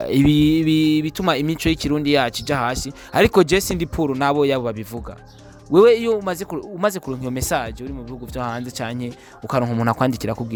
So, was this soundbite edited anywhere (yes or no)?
no